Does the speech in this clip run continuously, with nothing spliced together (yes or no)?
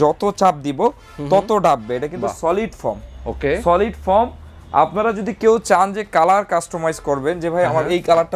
yes